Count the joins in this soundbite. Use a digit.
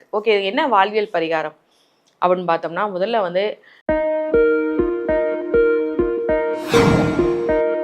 1